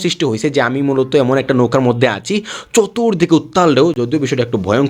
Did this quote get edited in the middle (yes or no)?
no